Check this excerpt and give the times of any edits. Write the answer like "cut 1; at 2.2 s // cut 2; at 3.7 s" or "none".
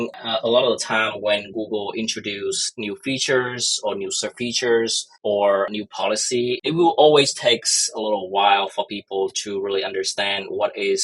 cut 1; at 6.6 s